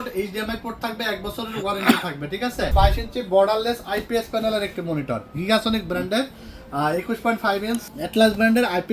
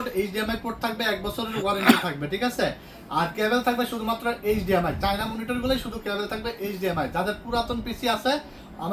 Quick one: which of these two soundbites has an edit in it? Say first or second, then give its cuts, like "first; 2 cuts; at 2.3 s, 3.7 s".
first; 2 cuts; at 2.7 s, 7.9 s